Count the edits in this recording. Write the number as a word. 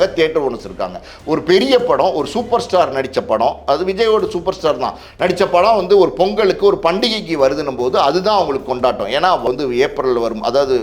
one